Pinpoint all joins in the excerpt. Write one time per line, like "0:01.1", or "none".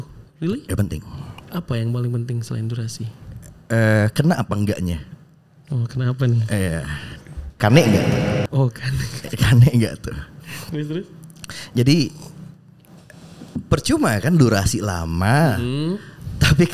none